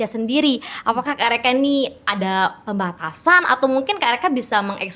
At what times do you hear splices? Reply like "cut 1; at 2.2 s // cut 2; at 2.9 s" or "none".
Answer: none